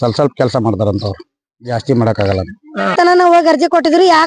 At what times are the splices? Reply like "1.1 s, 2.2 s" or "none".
2.9 s